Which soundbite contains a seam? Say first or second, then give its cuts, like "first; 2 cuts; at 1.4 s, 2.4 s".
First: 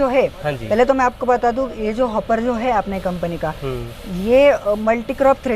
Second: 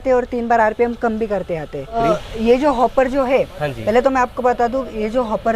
second; 1 cut; at 2.0 s